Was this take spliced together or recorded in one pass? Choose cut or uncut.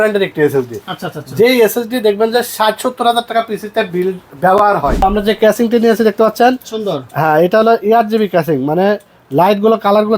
cut